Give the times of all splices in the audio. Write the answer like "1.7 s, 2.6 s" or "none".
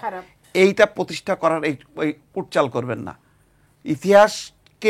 none